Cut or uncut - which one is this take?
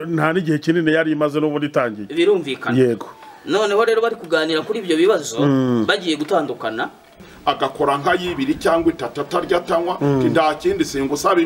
cut